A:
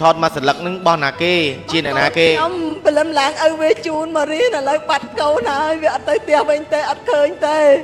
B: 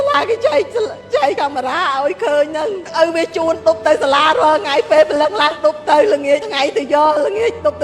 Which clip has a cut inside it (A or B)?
B